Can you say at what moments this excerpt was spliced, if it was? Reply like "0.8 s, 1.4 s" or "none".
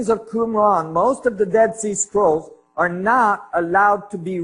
3.5 s